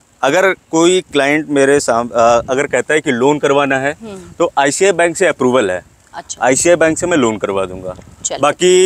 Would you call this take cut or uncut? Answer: uncut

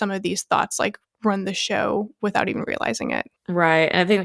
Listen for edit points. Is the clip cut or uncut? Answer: cut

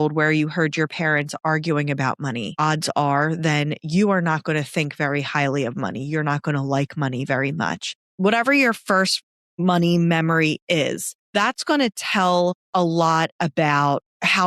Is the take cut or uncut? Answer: cut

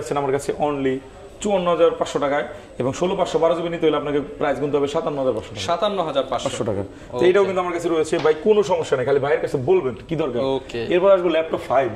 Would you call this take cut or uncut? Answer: uncut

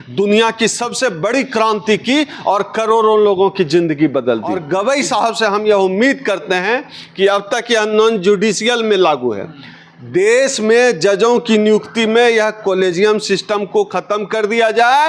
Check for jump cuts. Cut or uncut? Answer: cut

